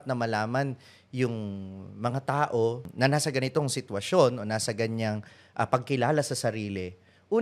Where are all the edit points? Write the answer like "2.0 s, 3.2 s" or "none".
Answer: 2.9 s